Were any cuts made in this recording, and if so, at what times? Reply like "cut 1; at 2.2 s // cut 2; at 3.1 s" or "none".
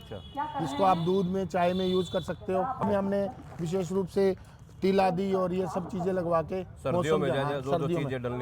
cut 1; at 2.8 s